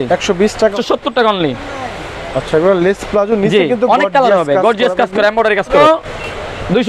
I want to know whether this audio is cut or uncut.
cut